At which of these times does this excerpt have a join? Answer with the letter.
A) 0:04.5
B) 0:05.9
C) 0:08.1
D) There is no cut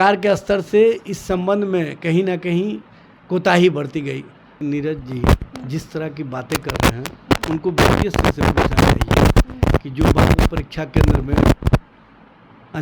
A